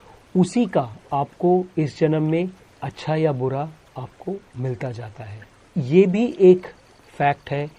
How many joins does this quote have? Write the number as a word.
zero